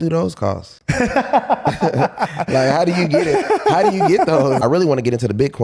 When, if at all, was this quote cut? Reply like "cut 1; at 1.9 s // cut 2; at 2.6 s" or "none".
cut 1; at 4.6 s